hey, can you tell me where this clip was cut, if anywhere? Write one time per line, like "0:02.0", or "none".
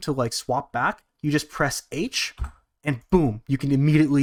none